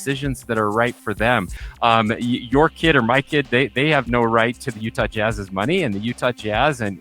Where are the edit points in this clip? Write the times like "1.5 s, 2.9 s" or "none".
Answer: 1.6 s